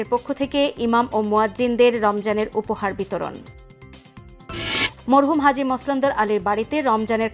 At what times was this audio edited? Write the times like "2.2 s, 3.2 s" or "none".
none

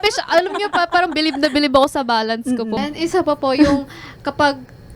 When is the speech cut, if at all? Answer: 2.8 s

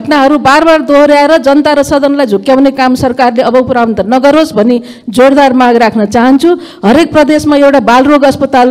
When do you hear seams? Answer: none

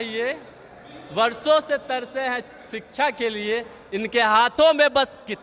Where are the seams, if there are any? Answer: none

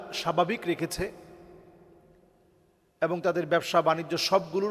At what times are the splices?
none

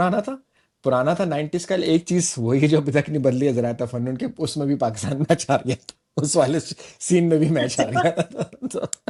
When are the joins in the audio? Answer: none

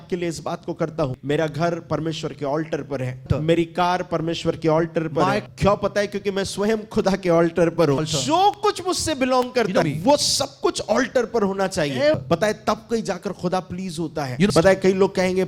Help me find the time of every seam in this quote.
1.2 s, 3.3 s, 5.4 s, 8.0 s, 9.8 s, 12.2 s, 14.5 s

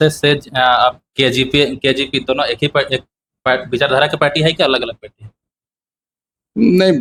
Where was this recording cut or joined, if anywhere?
none

